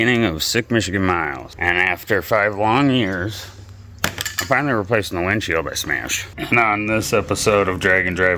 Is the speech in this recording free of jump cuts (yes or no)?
no